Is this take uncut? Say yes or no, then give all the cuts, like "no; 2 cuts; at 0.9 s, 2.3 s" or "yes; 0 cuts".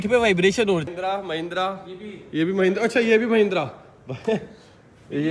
no; 1 cut; at 0.9 s